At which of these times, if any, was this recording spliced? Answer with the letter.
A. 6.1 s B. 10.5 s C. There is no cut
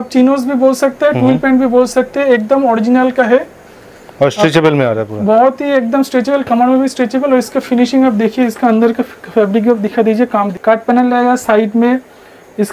B